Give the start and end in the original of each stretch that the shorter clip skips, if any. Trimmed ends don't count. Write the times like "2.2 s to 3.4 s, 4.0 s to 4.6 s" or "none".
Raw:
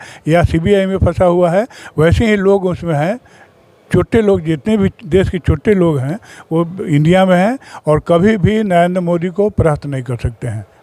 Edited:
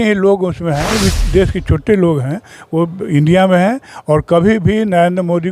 3.1 s to 4.7 s